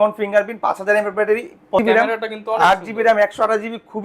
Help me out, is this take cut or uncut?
cut